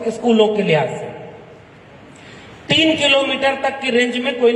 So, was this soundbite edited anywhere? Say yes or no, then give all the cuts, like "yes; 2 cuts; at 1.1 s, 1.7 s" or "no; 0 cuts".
no; 0 cuts